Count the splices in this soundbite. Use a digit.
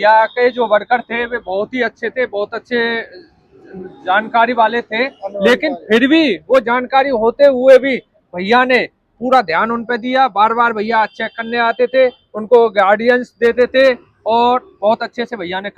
0